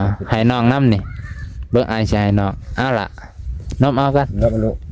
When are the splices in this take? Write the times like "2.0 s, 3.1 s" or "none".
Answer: none

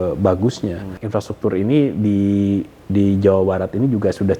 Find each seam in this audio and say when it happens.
0.9 s

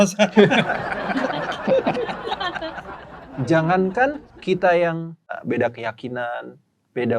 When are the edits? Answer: 2.9 s, 4.3 s, 5.4 s

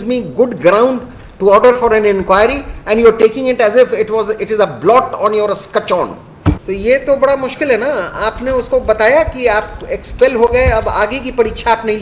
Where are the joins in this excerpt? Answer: 6.6 s

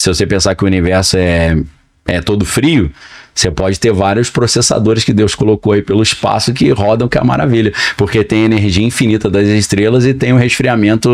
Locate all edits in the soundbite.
none

